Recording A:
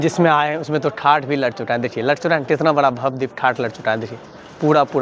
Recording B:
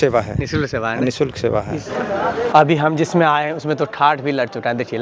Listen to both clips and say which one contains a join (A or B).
B